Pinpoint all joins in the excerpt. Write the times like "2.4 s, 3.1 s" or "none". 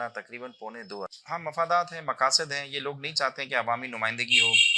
1.5 s